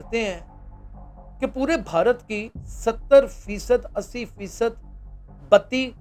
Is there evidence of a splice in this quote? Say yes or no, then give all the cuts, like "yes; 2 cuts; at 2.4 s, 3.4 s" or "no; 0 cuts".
no; 0 cuts